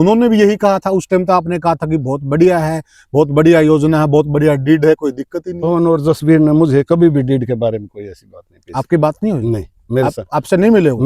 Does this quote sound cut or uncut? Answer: uncut